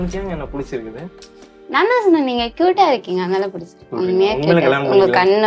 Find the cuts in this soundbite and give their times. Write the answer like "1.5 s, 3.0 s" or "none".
3.9 s